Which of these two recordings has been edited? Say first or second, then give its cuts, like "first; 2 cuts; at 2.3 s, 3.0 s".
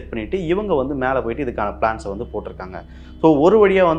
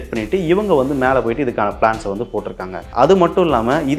second; 1 cut; at 2.8 s